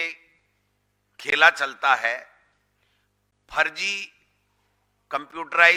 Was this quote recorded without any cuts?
yes; 0 cuts

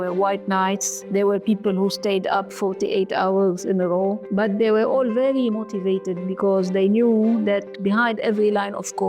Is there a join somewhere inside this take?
yes; 3 cuts; at 0.9 s, 2.5 s, 4.2 s

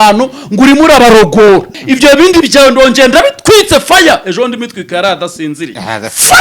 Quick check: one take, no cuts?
no; 1 cut; at 1.8 s

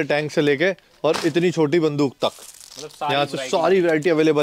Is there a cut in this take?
no; 0 cuts

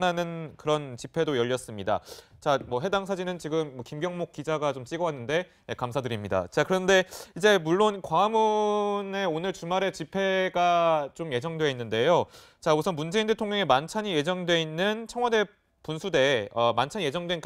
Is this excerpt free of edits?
yes; 0 cuts

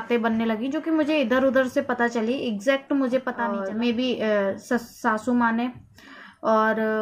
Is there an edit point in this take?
yes; 1 cut; at 3.6 s

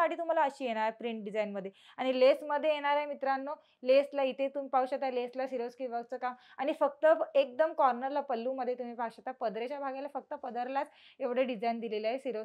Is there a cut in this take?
no; 0 cuts

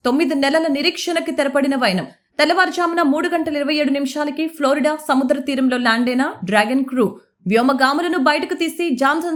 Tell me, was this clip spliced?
no; 0 cuts

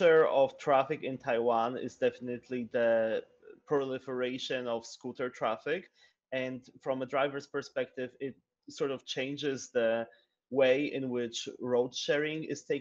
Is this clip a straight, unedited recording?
yes; 0 cuts

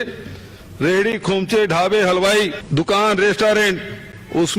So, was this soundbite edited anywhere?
yes; 1 cut; at 2.6 s

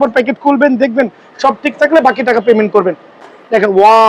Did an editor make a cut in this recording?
yes; 1 cut; at 3.1 s

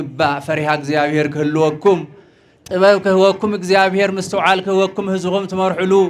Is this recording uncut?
yes; 0 cuts

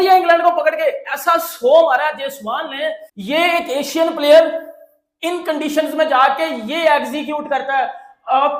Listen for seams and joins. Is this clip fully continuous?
no; 1 cut; at 3.1 s

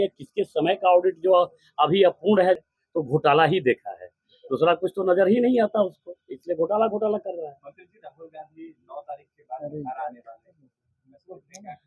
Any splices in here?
yes; 1 cut; at 2.6 s

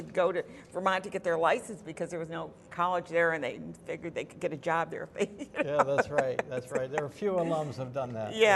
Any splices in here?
no; 0 cuts

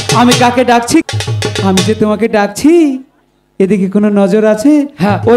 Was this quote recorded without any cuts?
no; 1 cut; at 1.0 s

